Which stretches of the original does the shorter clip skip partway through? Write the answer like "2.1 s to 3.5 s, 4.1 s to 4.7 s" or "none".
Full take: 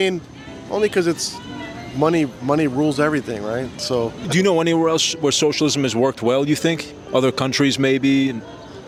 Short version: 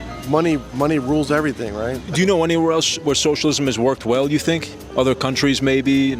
3.7 s to 4.2 s